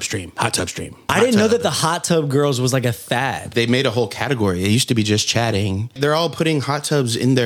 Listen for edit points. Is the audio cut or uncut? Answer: cut